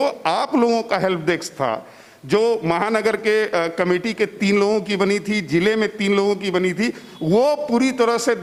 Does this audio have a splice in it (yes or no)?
no